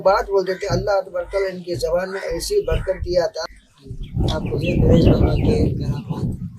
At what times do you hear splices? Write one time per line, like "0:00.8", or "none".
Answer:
0:03.4